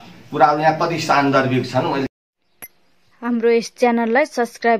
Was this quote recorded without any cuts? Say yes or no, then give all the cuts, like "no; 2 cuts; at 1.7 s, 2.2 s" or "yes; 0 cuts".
no; 1 cut; at 2.1 s